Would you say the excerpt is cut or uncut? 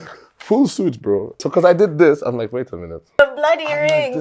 cut